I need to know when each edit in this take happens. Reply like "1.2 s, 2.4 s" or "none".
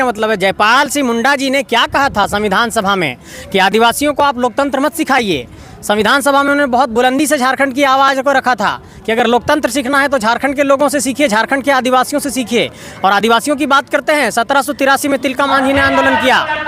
none